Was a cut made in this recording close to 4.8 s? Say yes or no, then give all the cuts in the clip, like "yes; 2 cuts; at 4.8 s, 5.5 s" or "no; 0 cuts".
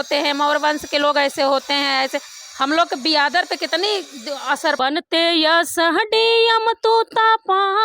yes; 1 cut; at 4.8 s